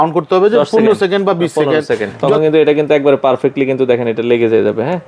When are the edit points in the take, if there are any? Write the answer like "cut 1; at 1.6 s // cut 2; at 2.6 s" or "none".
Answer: cut 1; at 2.2 s